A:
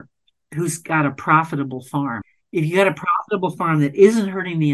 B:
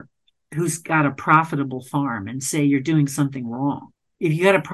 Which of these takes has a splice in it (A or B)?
A